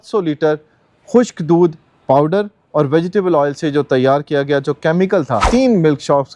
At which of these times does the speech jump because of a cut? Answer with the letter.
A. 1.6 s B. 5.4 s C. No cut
B